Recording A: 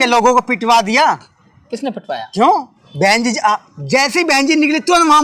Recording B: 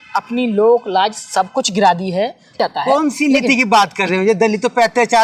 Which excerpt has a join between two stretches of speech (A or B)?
B